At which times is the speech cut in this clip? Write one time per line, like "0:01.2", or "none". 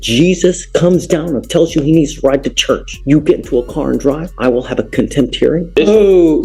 0:02.9
0:04.3
0:05.7